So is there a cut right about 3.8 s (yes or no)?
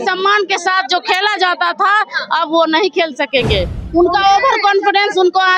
yes